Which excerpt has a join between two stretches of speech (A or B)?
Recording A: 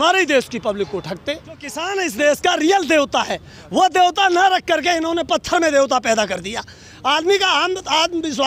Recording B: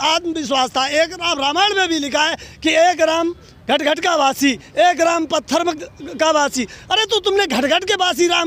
A